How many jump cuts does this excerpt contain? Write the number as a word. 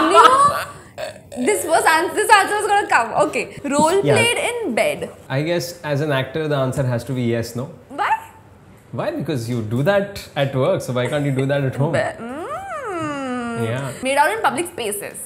three